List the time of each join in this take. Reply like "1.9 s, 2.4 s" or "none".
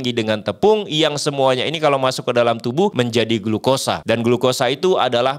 2.9 s, 4.0 s

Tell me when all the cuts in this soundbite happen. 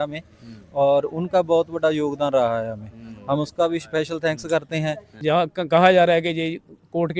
5.1 s

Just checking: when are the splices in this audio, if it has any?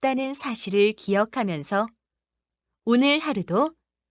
3.2 s

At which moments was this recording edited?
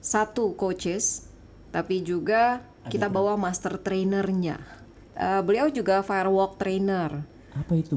5.1 s

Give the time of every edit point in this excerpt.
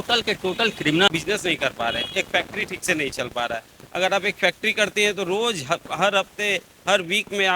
1.1 s

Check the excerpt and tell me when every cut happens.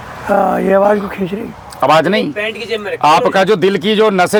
none

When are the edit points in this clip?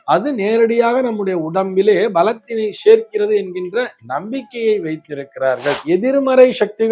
5.8 s

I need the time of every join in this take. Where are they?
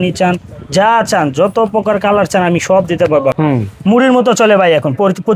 3.4 s

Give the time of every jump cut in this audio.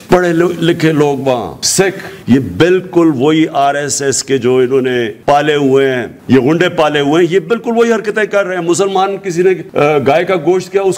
2.1 s, 5.1 s, 6.1 s, 9.7 s

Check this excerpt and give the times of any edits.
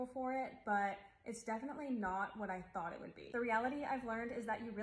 3.7 s

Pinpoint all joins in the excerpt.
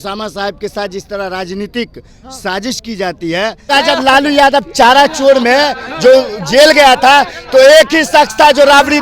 3.7 s

